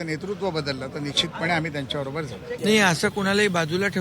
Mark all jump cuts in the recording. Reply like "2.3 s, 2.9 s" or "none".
2.4 s